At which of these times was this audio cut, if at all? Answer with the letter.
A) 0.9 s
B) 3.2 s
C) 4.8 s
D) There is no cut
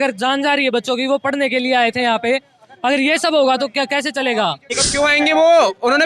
C